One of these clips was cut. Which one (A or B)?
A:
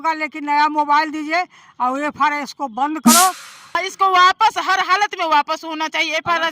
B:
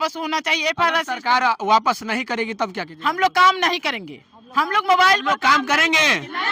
A